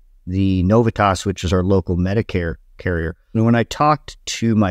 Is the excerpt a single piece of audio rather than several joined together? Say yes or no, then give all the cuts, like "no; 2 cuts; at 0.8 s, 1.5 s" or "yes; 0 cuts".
no; 1 cut; at 3.2 s